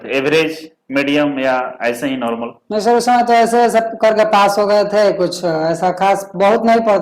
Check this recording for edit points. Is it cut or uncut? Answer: uncut